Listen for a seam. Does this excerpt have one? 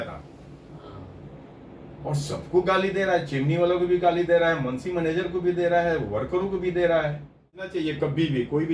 yes; 1 cut; at 7.7 s

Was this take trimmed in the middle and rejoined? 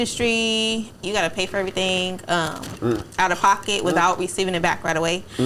no; 0 cuts

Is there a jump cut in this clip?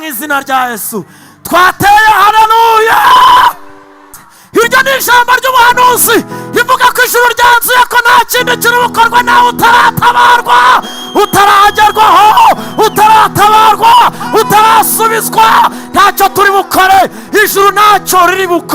yes; 1 cut; at 4.2 s

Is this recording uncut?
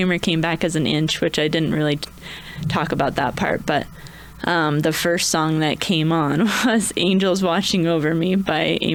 yes; 0 cuts

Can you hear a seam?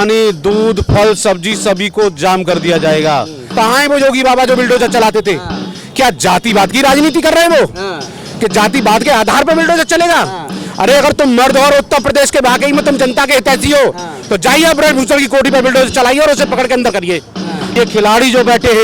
yes; 2 cuts; at 3.4 s, 17.8 s

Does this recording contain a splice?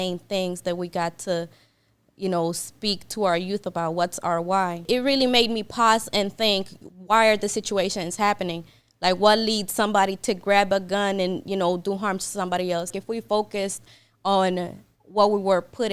yes; 2 cuts; at 4.8 s, 12.9 s

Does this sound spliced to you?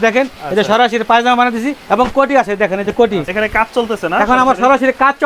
yes; 2 cuts; at 1.8 s, 3.3 s

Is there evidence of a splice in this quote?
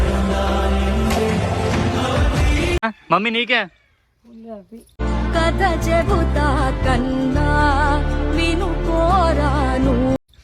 yes; 1 cut; at 2.8 s

